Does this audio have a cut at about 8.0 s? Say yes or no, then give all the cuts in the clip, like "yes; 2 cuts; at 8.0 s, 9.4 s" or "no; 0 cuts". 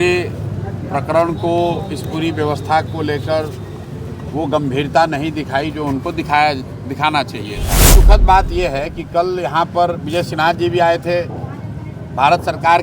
yes; 1 cut; at 8.0 s